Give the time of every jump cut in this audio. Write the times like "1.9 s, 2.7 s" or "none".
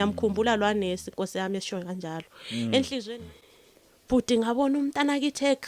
3.1 s